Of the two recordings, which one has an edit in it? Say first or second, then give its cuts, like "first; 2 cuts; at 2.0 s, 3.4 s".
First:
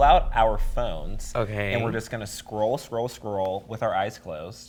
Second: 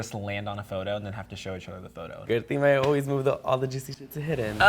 second; 1 cut; at 2.2 s